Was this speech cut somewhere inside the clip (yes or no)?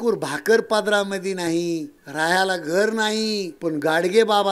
yes